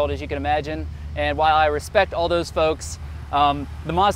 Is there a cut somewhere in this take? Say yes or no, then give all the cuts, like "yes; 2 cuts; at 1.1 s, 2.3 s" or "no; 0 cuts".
no; 0 cuts